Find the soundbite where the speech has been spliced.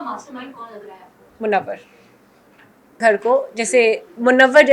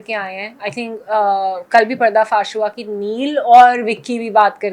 first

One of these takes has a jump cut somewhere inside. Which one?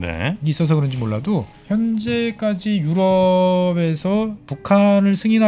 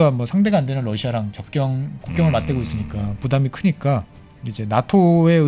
first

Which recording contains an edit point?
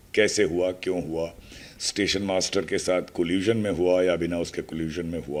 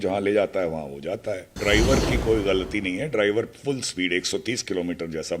second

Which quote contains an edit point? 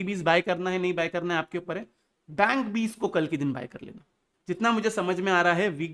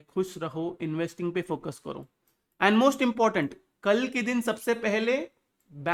first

